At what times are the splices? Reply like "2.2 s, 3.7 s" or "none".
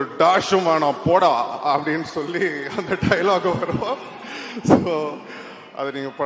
none